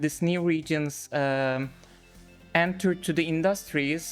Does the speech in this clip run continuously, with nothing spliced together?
yes; 0 cuts

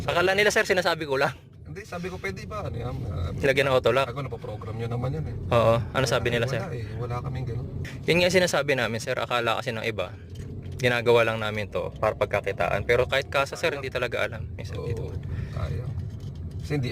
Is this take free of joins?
no; 1 cut; at 7.8 s

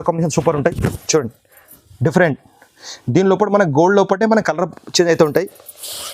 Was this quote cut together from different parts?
no; 0 cuts

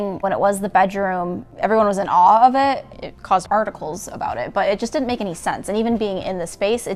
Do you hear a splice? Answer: no; 0 cuts

